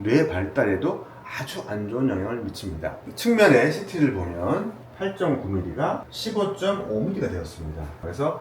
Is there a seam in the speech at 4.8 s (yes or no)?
yes